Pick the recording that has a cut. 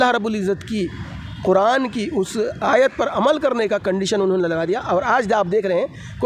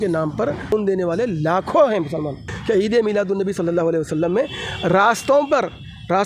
second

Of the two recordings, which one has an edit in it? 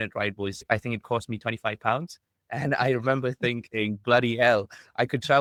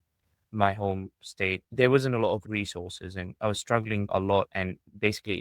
second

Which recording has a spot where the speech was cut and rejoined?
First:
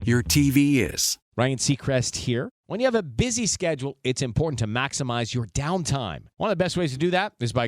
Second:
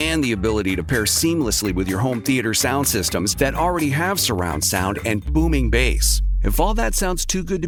first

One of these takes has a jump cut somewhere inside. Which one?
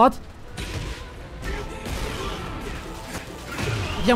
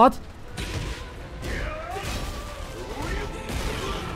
first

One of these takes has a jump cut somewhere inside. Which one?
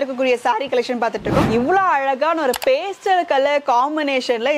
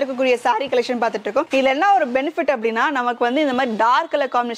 first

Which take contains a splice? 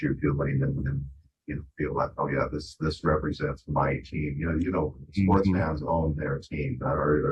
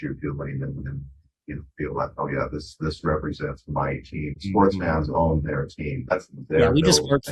second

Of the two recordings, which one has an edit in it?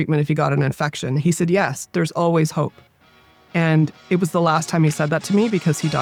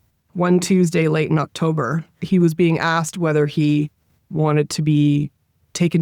second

